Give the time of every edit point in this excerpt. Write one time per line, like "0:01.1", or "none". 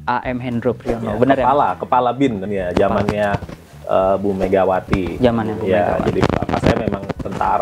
none